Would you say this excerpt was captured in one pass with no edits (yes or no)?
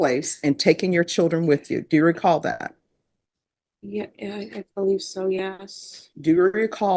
yes